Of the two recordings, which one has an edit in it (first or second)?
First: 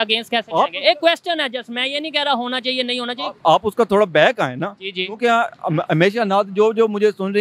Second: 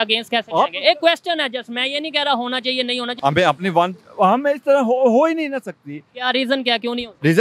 second